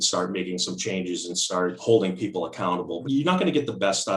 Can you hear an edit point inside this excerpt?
yes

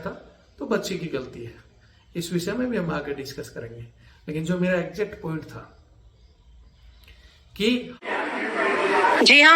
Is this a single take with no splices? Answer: no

